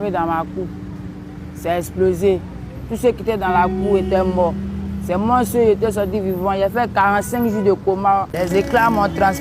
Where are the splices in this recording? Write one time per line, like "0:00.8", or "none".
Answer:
0:08.3